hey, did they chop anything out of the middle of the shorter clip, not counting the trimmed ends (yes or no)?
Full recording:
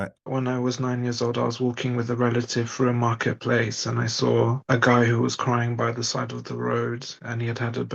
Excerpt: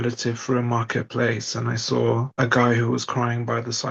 no